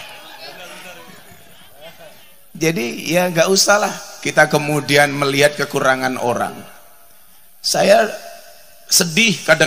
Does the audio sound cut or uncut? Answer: uncut